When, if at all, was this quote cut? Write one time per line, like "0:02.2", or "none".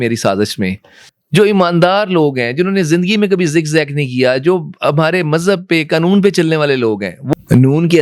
0:01.0
0:07.2